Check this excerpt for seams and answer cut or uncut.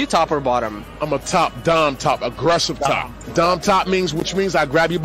cut